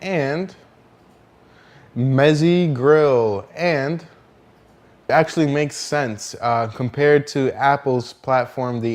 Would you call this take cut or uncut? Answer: uncut